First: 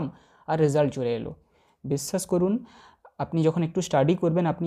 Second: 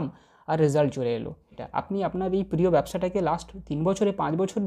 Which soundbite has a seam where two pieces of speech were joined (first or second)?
second